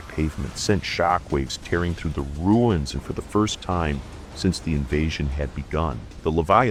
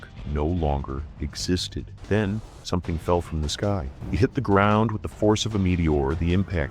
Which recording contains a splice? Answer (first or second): second